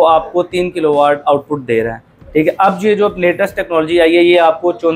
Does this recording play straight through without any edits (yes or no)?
yes